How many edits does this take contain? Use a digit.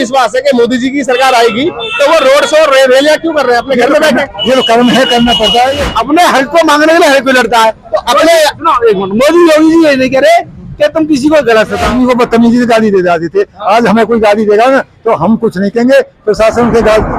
2